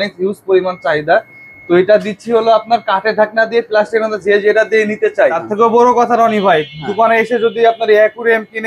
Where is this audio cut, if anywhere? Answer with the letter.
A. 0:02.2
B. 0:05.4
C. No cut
B